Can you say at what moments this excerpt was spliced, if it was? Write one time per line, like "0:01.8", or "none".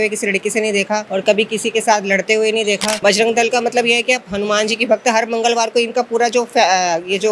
0:01.1
0:02.9